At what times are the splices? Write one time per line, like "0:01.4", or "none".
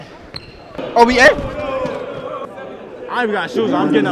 0:00.8
0:02.5